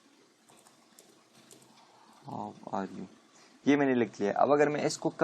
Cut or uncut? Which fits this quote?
cut